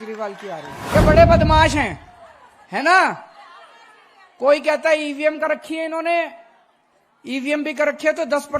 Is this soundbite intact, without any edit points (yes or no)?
no